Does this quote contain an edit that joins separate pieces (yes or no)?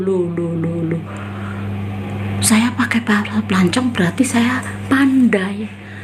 no